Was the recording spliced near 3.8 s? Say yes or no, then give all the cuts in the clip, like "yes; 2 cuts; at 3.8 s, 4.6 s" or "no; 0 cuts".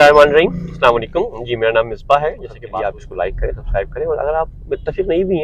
no; 1 cut; at 2.5 s